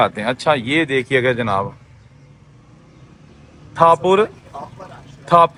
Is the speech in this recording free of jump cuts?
yes; 0 cuts

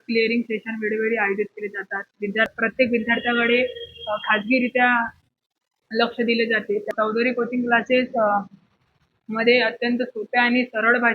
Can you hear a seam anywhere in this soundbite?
yes; 1 cut; at 2.5 s

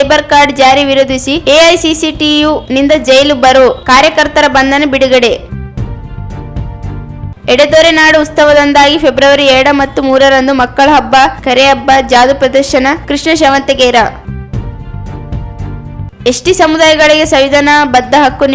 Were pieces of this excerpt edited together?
yes; 2 cuts; at 5.4 s, 6.9 s

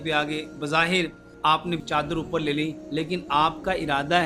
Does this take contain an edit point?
yes; 2 cuts; at 1.2 s, 2.8 s

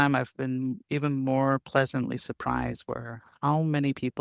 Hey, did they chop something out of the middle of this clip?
no; 0 cuts

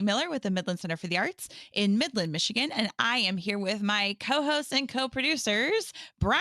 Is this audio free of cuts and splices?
yes; 0 cuts

